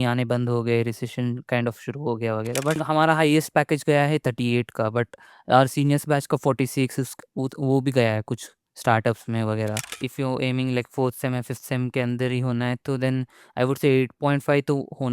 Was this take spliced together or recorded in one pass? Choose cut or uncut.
cut